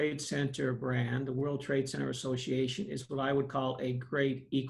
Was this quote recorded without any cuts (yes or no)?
yes